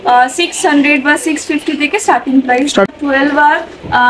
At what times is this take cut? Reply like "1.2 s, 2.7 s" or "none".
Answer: 2.9 s